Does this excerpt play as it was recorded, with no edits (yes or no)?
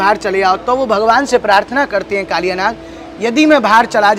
yes